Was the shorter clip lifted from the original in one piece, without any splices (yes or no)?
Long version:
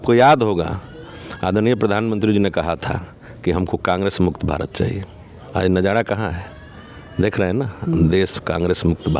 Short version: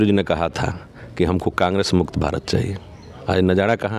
yes